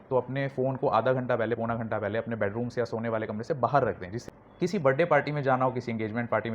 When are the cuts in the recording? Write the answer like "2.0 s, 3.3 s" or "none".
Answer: 4.1 s

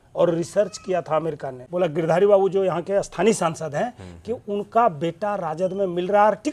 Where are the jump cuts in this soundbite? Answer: 1.5 s

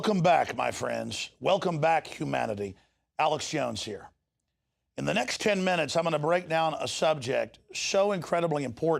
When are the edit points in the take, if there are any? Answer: none

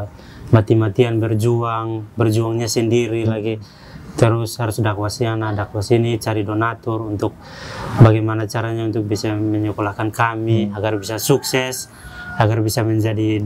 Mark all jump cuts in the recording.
none

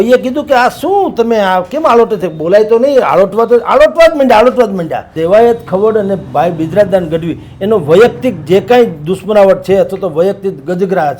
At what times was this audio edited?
5.1 s

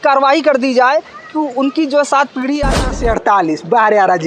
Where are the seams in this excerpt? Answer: 2.8 s

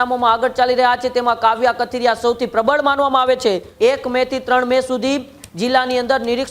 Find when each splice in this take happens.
3.7 s

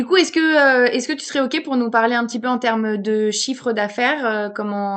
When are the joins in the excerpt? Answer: none

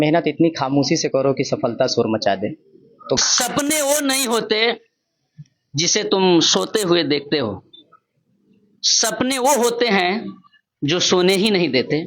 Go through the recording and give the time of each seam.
3.2 s

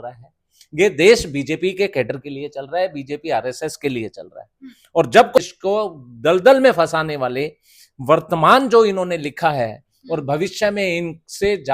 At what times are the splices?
5.4 s

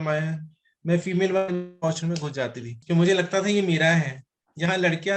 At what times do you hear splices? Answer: 2.8 s

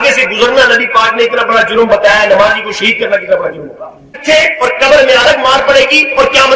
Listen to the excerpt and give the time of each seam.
4.2 s

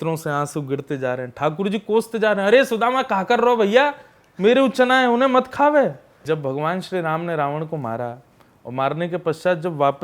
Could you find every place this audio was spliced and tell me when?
6.2 s

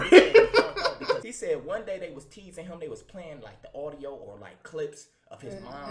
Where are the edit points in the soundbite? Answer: 1.3 s

